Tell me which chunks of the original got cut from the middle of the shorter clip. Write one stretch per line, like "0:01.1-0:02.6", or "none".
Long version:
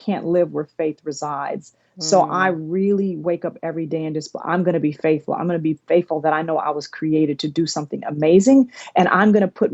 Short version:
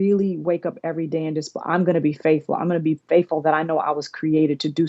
none